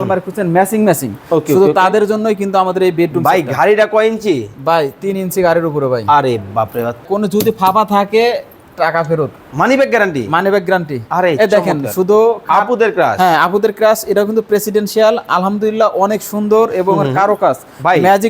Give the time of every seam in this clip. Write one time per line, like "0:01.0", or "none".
0:07.0